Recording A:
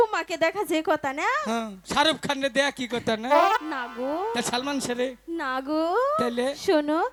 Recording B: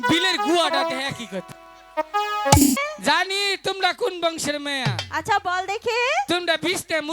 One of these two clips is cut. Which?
B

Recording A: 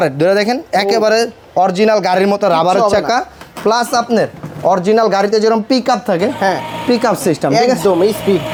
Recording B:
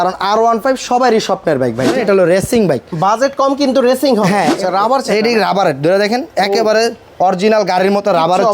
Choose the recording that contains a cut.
B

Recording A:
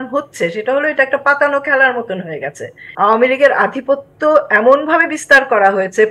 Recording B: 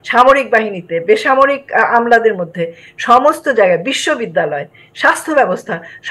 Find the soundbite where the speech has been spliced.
A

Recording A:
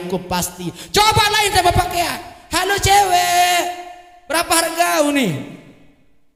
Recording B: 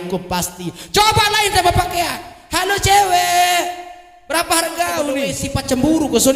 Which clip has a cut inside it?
B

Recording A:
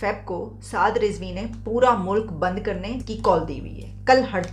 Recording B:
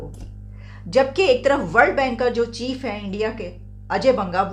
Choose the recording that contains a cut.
A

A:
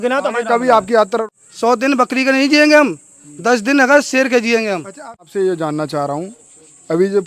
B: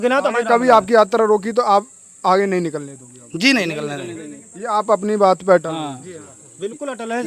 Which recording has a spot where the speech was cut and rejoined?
A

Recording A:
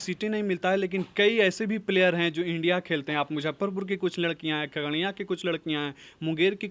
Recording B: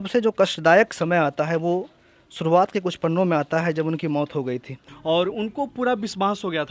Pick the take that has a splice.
B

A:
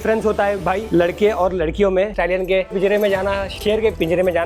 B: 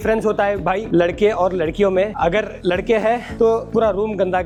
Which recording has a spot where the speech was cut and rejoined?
A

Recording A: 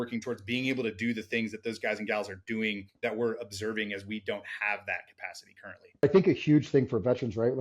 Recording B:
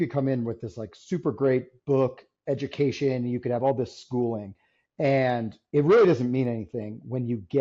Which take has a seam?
A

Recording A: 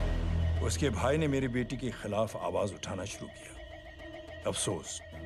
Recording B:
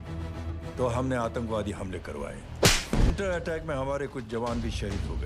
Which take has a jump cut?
B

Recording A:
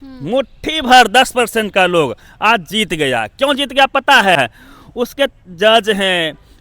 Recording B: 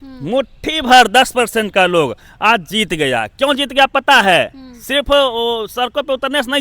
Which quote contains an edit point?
A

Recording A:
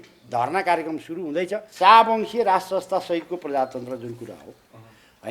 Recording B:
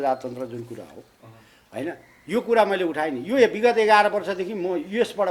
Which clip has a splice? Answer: A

